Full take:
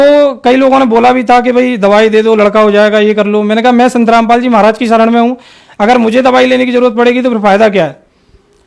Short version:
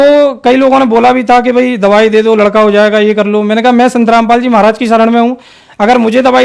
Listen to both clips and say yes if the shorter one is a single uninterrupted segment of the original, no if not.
yes